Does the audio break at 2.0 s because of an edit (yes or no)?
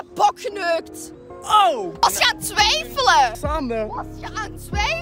yes